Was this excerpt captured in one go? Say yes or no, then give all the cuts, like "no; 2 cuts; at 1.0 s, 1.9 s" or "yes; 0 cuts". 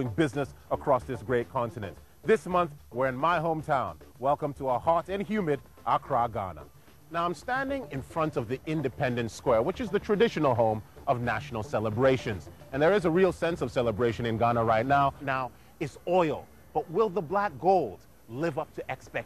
yes; 0 cuts